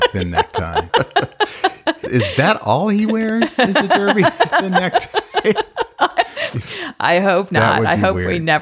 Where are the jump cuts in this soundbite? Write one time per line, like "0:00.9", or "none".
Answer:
0:00.9
0:02.0
0:06.6